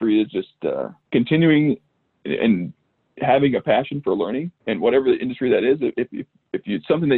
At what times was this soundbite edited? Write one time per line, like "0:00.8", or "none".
0:00.9